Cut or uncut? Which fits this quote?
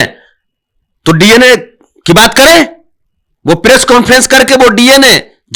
uncut